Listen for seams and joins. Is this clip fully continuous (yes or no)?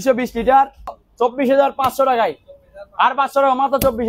no